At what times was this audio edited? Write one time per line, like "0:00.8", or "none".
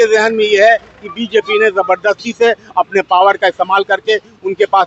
none